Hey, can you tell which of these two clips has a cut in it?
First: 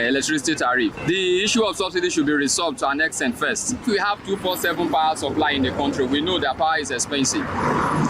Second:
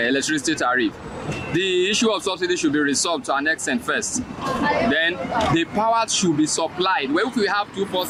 first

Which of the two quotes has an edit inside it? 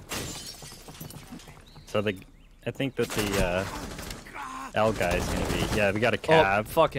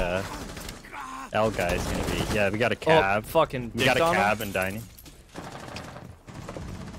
second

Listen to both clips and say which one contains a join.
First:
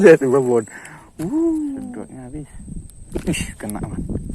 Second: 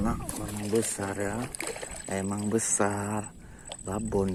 first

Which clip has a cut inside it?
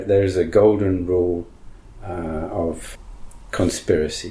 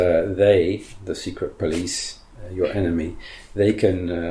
first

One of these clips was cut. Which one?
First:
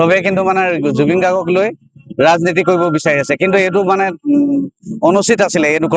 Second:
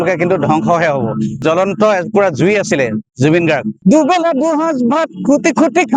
second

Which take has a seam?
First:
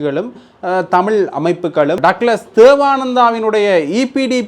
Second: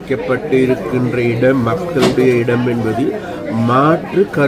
first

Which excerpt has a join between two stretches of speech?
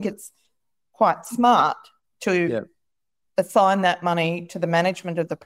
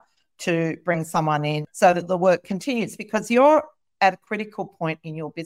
second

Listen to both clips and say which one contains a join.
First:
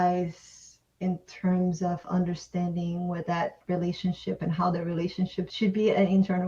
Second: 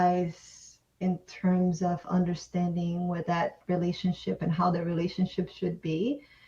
first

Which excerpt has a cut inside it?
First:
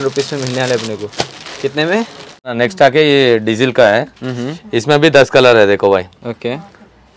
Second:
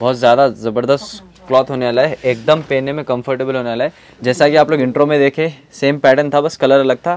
first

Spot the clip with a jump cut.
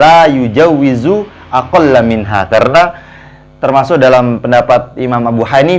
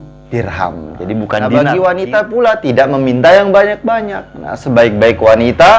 second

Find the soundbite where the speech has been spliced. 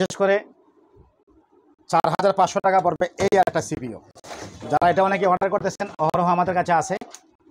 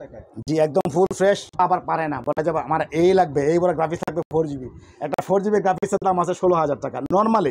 second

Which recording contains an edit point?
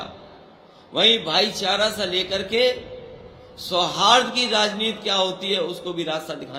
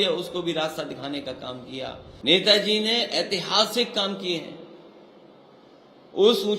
second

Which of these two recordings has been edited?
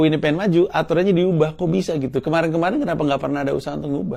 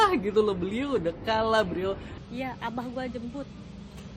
second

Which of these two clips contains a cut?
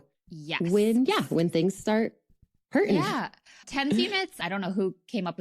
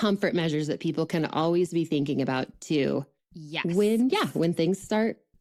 first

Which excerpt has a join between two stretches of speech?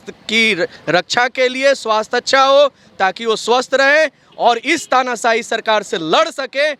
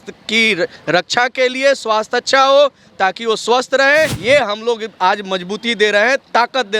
second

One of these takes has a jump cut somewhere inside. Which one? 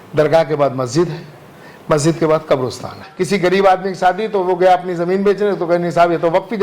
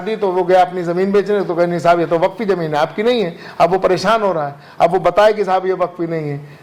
first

